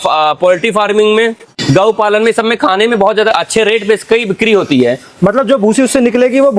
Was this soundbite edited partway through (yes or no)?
yes